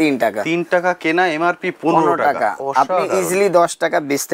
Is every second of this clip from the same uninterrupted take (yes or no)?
yes